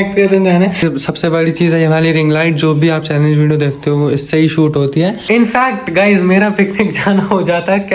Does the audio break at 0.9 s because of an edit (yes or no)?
yes